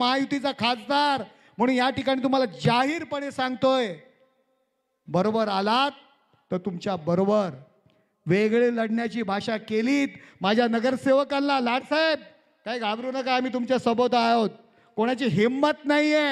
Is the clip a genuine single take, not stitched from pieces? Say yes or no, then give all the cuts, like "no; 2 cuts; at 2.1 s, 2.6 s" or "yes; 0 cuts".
yes; 0 cuts